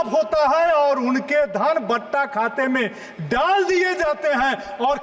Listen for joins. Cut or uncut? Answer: uncut